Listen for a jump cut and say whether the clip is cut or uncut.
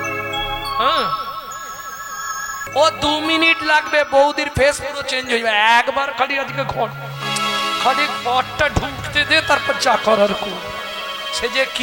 cut